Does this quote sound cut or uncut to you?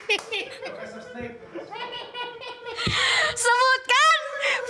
uncut